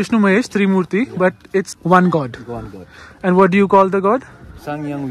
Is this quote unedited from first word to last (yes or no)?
no